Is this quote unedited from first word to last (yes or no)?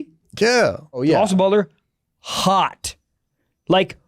no